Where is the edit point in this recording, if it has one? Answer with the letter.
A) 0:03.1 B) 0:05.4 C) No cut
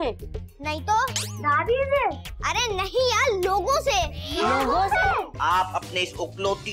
B